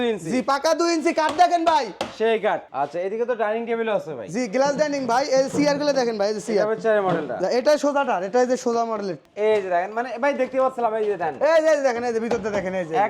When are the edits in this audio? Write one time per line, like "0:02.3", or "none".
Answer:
0:02.7
0:09.2